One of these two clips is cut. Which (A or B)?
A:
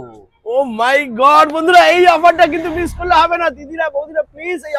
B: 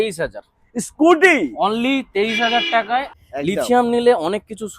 B